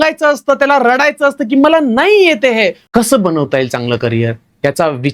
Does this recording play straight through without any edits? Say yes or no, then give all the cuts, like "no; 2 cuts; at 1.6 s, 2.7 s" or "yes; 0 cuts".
no; 1 cut; at 2.8 s